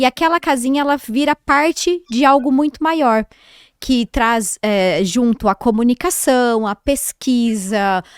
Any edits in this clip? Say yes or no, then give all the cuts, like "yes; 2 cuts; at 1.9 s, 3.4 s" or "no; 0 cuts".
no; 0 cuts